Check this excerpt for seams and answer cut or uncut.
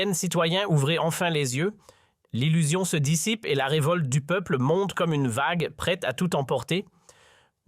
cut